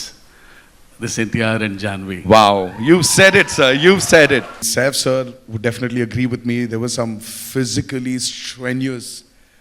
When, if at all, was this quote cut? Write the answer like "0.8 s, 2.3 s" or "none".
4.6 s